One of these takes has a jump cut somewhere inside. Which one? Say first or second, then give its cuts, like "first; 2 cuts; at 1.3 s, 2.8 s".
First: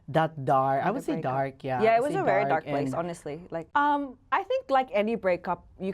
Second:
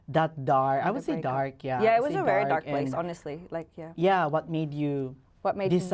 first; 1 cut; at 3.5 s